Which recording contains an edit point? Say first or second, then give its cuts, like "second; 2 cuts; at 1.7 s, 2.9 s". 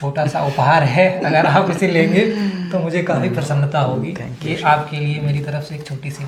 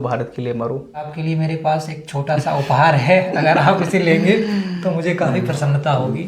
second; 1 cut; at 1.1 s